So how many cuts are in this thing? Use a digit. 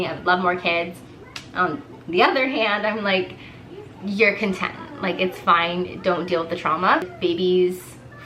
1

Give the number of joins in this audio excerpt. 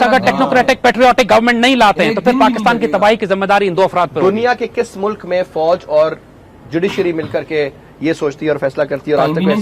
0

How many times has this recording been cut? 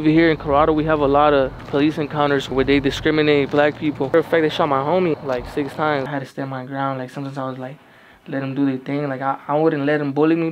4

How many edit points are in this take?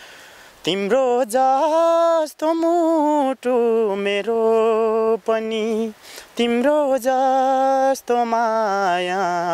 0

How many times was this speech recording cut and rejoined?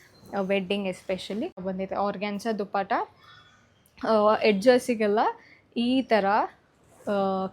1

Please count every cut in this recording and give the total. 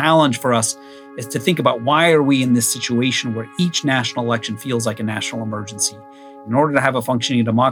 1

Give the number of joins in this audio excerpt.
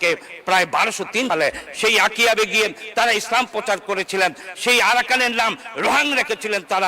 1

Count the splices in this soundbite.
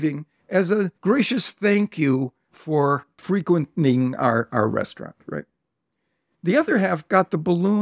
2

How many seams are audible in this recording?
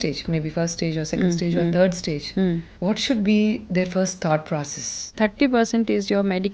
2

